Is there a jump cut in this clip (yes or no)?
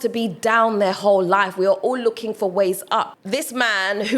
yes